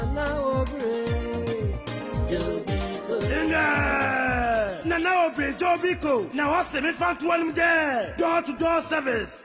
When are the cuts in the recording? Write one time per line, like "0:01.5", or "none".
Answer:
0:02.2